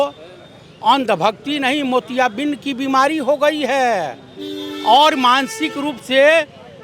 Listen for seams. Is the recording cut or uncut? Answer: uncut